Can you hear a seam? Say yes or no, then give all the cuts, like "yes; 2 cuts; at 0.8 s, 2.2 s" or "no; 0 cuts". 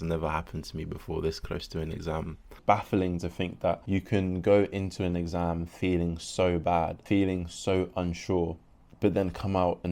yes; 3 cuts; at 2.6 s, 3.8 s, 7.0 s